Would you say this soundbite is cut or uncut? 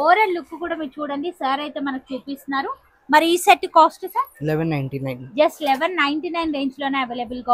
uncut